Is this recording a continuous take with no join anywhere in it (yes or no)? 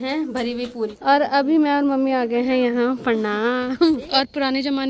no